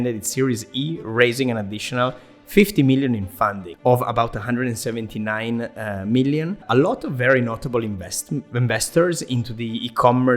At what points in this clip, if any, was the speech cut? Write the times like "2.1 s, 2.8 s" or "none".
3.7 s, 6.6 s